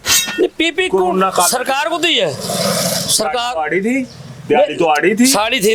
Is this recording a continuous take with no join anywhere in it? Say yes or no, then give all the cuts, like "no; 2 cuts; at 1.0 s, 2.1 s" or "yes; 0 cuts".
yes; 0 cuts